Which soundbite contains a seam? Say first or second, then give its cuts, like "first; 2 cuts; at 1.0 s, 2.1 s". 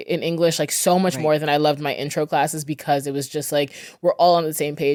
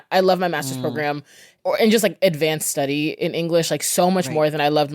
second; 1 cut; at 1.5 s